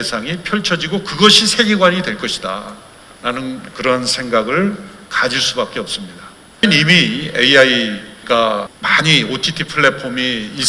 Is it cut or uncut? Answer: cut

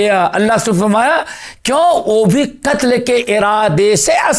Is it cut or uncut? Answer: uncut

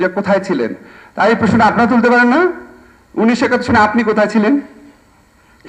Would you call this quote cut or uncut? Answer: uncut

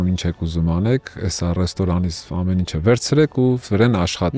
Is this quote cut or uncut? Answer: uncut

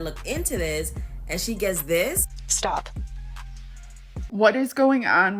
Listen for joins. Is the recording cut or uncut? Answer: cut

